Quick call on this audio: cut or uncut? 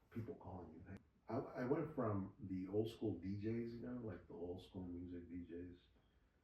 cut